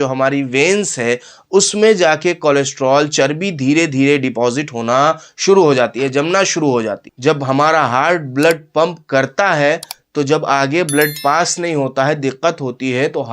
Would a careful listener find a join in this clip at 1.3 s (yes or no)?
no